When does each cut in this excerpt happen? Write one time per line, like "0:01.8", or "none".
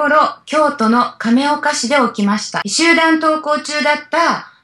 0:02.6

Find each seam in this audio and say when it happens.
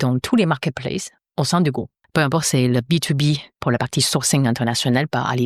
0:01.2
0:02.0
0:03.5

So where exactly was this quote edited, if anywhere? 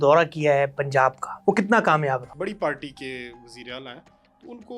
0:01.3
0:02.3

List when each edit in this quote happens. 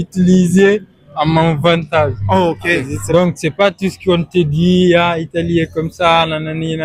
0:03.0

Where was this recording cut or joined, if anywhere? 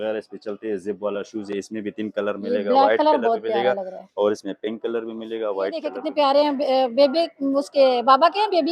0:06.0

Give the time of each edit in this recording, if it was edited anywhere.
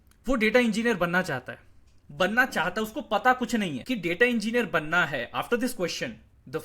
0:03.8

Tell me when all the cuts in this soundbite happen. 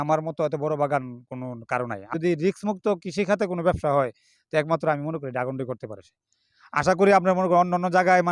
0:02.1
0:06.7

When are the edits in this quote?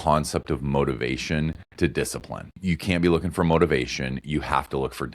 0:02.5

